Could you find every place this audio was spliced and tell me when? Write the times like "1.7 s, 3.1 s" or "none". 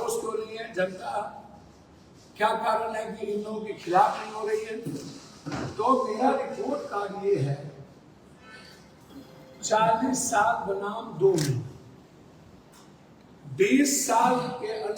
9.0 s